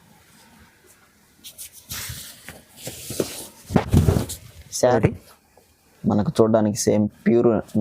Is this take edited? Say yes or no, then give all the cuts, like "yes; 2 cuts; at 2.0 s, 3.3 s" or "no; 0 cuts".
yes; 1 cut; at 4.9 s